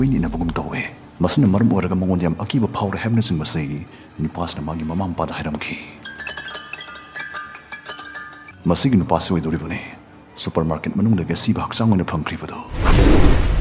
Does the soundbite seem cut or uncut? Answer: cut